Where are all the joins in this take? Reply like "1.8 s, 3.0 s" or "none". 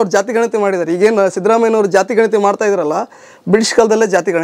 none